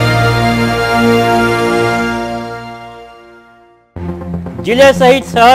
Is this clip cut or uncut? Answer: cut